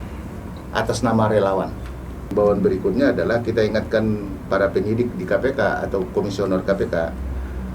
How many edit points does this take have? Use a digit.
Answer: 1